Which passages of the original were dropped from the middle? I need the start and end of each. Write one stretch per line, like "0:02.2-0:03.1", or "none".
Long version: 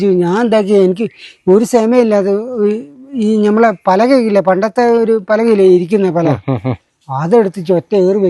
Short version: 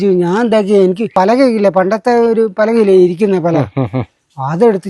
0:01.1-0:03.8

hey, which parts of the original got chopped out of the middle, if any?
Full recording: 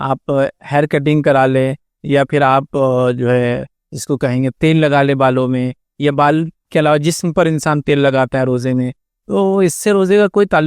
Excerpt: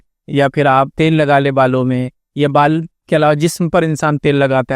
0:02.7-0:04.6

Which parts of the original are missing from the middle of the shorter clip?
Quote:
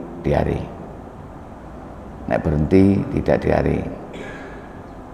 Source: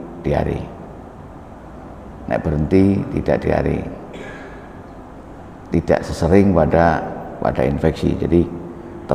none

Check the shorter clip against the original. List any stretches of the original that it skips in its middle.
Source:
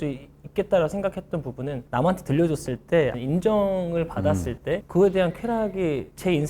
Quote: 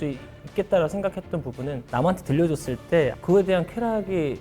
0:03.2-0:04.8

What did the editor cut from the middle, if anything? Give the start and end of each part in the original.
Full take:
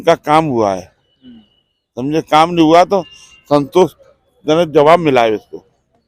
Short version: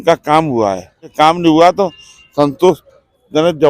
0:01.1-0:02.3

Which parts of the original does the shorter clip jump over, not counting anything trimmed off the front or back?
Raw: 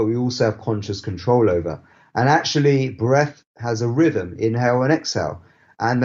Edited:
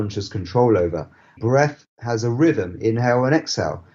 0:02.1-0:02.9

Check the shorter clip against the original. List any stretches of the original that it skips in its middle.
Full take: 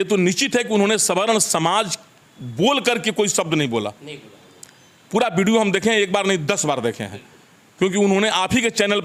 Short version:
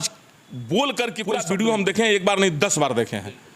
0:03.1-0:05.1

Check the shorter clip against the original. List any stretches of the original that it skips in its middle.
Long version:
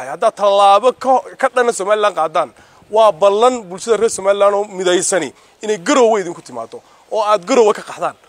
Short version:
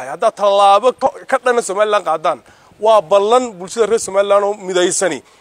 0:01.1-0:01.2

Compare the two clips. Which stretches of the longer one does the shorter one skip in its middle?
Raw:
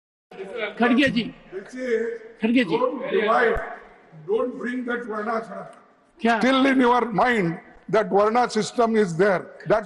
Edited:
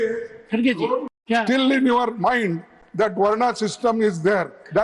0:03.0-0:06.0

